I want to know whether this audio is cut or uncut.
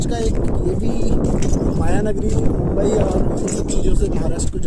uncut